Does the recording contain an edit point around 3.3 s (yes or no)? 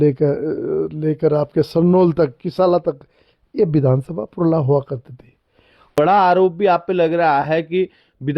no